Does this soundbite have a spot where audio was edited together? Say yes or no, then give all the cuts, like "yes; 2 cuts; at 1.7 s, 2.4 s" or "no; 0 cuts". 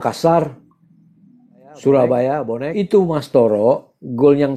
yes; 1 cut; at 2.6 s